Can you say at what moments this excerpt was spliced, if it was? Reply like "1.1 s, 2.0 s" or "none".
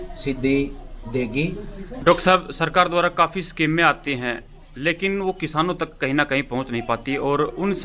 1.8 s